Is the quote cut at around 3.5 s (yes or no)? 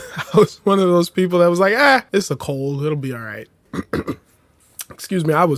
yes